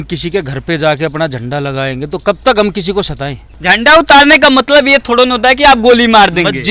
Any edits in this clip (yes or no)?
yes